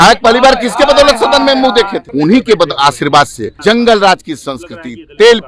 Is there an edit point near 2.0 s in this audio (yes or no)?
yes